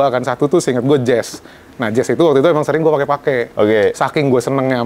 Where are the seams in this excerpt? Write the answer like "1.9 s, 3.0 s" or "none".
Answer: none